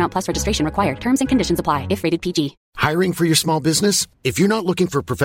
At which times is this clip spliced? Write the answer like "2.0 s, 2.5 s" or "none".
2.6 s